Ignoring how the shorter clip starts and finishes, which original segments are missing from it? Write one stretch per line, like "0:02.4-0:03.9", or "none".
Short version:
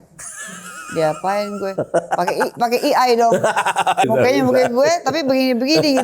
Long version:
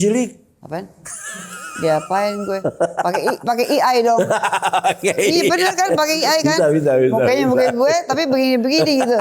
0:04.9-0:07.1